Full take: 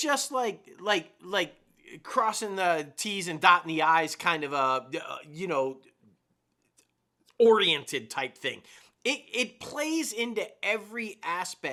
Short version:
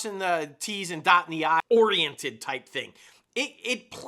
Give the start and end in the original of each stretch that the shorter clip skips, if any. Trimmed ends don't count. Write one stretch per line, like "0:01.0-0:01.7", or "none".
0:04.0-0:07.3